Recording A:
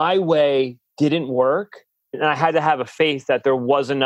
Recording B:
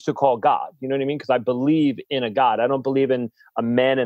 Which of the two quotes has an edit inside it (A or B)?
A